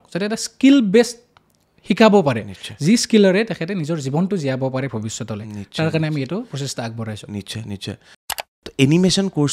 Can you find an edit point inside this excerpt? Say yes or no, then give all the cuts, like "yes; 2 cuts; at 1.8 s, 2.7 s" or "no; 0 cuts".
yes; 1 cut; at 8.3 s